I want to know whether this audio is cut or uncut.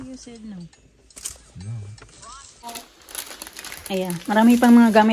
cut